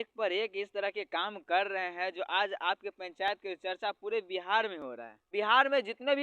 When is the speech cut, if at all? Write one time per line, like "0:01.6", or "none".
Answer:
0:05.3